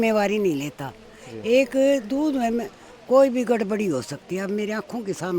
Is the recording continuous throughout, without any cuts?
yes; 0 cuts

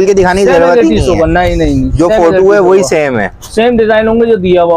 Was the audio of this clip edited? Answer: no; 0 cuts

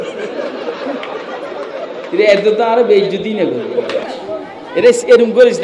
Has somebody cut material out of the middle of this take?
yes; 1 cut; at 4.1 s

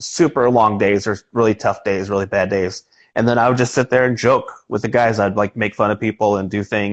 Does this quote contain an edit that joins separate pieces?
no; 0 cuts

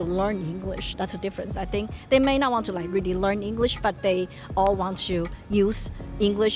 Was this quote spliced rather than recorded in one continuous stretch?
no; 0 cuts

